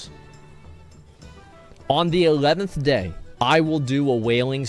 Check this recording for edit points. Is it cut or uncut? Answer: cut